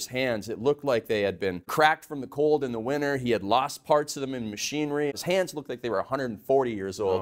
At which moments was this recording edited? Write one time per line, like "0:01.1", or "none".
0:01.7
0:05.1